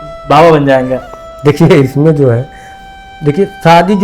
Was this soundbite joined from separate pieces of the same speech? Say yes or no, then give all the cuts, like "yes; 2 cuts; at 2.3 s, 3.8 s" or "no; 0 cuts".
no; 0 cuts